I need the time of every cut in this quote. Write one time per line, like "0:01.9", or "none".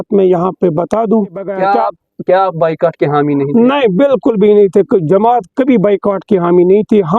0:01.6